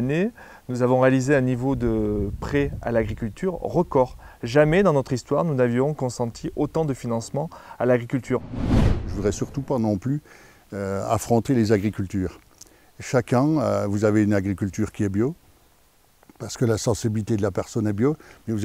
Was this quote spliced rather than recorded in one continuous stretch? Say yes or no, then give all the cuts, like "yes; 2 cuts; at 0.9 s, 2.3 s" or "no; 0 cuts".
yes; 1 cut; at 9.0 s